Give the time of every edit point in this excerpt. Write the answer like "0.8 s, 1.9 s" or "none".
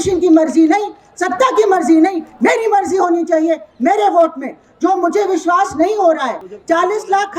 6.5 s